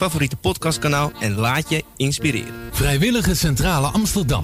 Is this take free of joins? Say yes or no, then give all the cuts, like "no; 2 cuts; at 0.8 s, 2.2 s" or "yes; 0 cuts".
yes; 0 cuts